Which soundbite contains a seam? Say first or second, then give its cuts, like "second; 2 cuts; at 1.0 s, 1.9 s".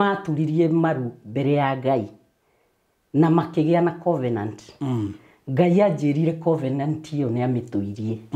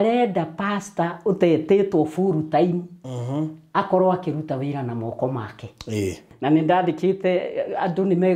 second; 1 cut; at 6.3 s